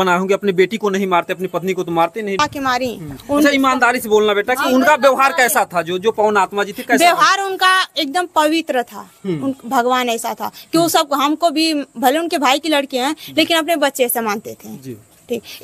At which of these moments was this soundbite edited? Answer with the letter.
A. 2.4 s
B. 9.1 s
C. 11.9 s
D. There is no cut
A